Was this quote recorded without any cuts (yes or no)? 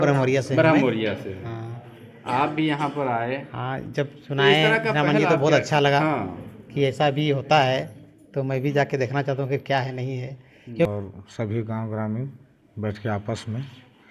no